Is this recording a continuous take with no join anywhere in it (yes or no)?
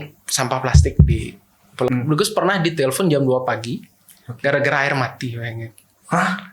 no